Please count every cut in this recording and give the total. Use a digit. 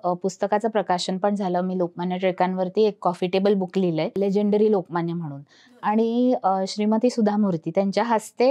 0